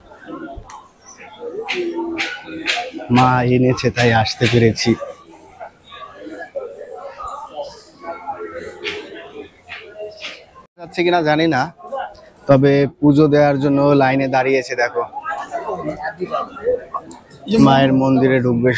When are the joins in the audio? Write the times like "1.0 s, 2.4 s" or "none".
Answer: 10.9 s